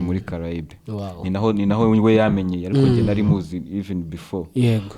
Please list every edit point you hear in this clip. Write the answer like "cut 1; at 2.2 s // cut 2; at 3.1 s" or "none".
none